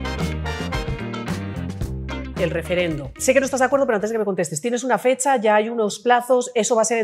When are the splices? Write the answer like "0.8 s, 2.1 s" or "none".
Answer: 2.3 s, 3.2 s